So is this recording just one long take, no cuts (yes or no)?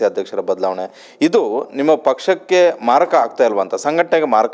yes